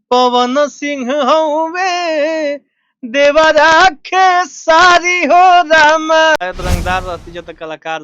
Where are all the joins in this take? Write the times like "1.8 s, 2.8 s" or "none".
6.4 s

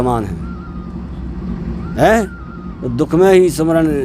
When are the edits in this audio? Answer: none

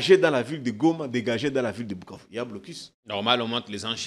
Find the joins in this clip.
none

